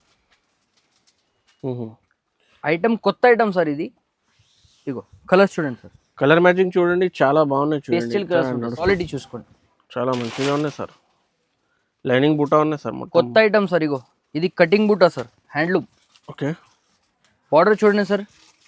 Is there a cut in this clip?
yes; 1 cut; at 8.9 s

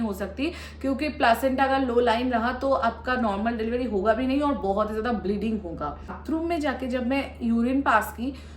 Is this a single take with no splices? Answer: no; 1 cut; at 6.2 s

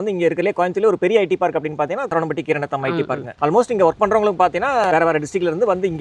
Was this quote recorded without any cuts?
no; 3 cuts; at 2.1 s, 3.2 s, 4.9 s

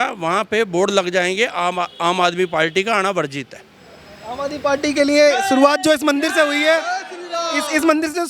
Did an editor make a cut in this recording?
no; 0 cuts

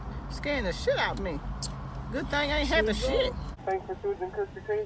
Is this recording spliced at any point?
yes; 1 cut; at 3.5 s

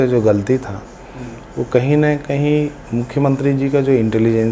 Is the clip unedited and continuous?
yes; 0 cuts

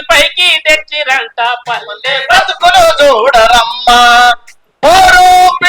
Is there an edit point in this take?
no; 0 cuts

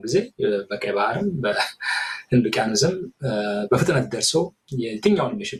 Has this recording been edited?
no; 0 cuts

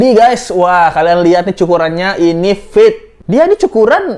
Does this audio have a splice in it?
yes; 1 cut; at 3.1 s

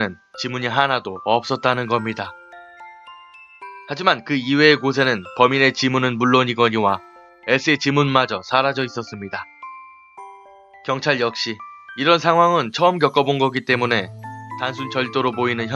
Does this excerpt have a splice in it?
yes; 1 cut; at 14.6 s

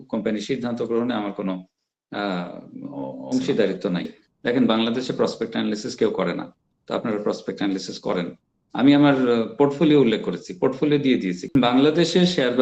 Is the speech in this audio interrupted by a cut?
yes; 2 cuts; at 4.2 s, 11.5 s

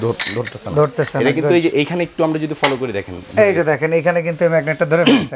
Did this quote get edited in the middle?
no; 0 cuts

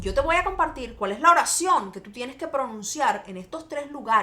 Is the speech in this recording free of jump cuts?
yes; 0 cuts

